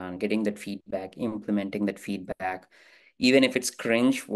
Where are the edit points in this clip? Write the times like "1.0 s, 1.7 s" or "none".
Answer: none